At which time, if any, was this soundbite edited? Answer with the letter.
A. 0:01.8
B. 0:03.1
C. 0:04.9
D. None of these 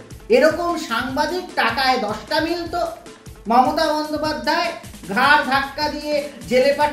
B